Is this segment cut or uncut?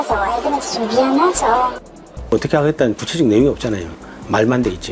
cut